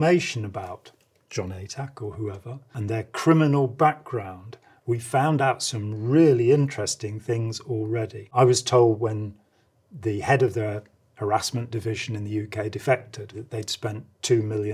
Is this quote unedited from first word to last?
no; 3 cuts; at 2.7 s, 8.2 s, 13.4 s

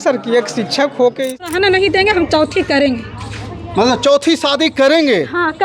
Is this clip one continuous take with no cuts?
no; 1 cut; at 1.5 s

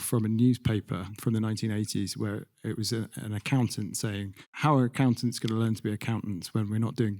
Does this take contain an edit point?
yes; 1 cut; at 1.1 s

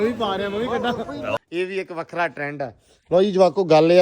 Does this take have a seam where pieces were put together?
yes; 1 cut; at 1.4 s

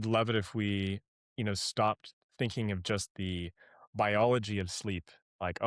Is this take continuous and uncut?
yes; 0 cuts

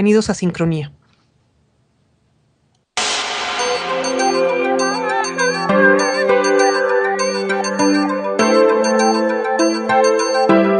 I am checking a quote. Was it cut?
no; 0 cuts

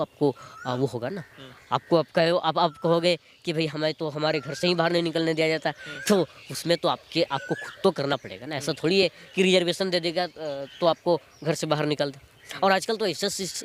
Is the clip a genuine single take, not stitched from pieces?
yes; 0 cuts

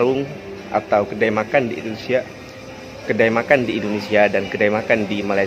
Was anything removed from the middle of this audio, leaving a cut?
no; 0 cuts

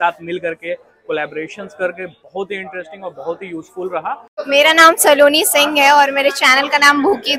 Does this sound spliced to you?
yes; 1 cut; at 4.3 s

